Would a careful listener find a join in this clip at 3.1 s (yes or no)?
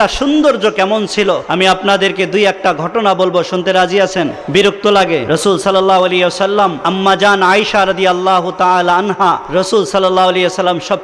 no